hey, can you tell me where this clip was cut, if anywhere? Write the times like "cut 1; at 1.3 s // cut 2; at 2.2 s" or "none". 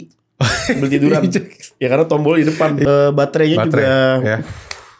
cut 1; at 2.8 s